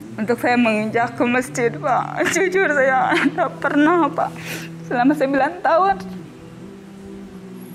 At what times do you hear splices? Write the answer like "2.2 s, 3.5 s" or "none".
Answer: 6.0 s